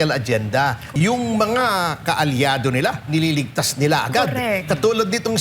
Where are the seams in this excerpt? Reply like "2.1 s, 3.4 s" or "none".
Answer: 0.9 s